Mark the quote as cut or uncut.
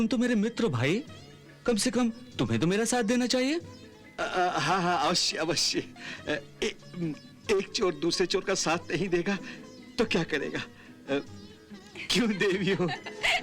uncut